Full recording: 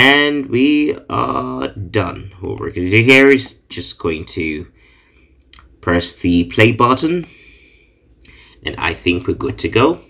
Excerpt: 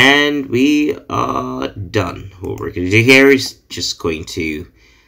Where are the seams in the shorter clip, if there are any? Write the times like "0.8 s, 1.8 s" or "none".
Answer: none